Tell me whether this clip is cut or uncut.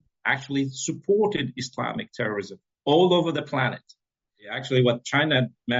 cut